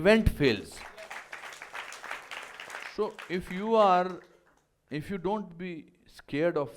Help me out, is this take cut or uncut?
cut